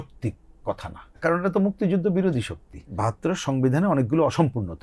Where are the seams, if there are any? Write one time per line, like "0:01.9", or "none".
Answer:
0:01.2
0:02.9